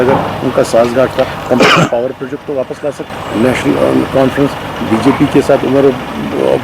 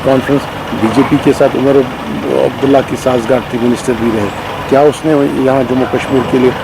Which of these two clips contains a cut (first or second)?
first